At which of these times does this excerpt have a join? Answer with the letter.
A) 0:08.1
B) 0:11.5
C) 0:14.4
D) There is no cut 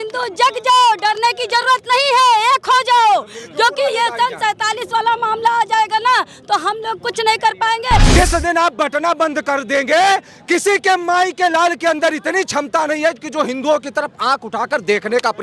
A